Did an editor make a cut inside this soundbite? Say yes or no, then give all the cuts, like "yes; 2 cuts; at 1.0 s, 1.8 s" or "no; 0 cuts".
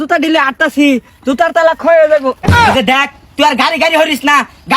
yes; 1 cut; at 2.4 s